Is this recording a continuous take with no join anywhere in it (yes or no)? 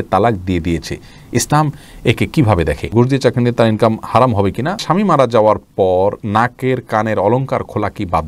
no